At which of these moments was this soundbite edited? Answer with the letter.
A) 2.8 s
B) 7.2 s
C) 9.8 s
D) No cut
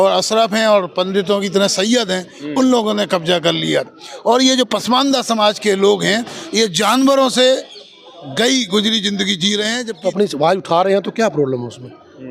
C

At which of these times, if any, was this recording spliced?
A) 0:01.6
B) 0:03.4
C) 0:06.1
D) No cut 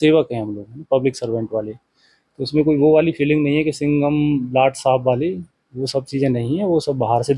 D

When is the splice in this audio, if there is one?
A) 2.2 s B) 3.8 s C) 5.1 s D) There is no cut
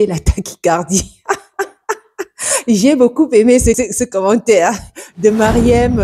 B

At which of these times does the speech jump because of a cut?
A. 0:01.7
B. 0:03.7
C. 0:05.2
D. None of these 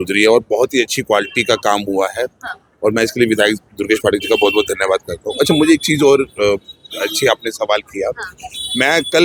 D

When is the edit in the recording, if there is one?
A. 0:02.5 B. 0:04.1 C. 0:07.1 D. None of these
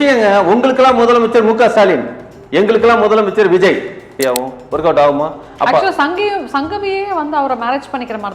B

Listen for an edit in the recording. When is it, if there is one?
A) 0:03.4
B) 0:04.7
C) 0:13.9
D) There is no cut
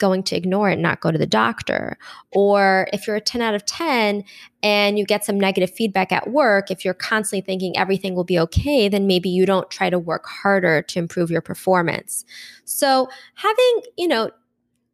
D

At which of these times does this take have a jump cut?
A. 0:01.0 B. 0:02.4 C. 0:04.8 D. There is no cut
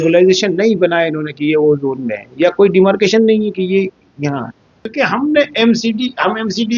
C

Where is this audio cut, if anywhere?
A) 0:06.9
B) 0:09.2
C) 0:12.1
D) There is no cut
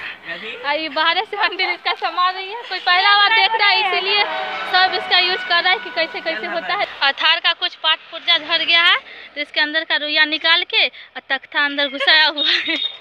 A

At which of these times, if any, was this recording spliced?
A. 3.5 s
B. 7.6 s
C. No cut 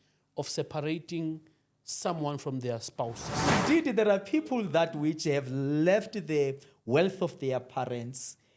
A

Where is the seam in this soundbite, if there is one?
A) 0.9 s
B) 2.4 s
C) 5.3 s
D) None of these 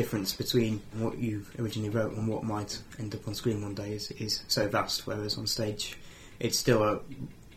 A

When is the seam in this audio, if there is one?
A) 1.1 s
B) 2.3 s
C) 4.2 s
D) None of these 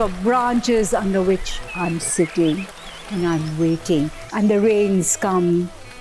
C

